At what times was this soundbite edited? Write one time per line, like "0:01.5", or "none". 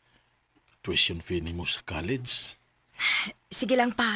none